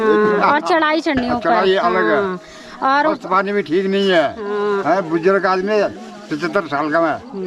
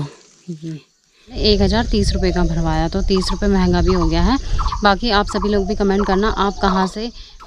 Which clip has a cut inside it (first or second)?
second